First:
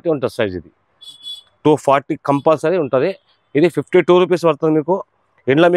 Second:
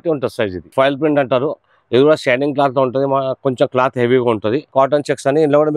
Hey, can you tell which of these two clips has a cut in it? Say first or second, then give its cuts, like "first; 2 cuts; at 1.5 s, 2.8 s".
second; 2 cuts; at 0.7 s, 4.7 s